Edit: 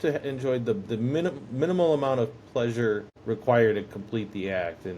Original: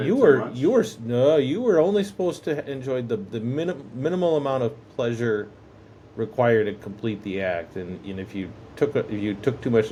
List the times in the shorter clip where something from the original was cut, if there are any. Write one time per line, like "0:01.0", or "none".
0:03.1